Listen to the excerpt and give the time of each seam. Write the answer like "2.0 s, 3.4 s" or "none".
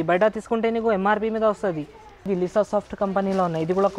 2.3 s